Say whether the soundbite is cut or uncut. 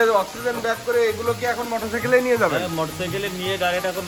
uncut